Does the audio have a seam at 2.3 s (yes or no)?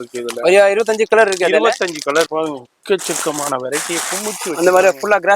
yes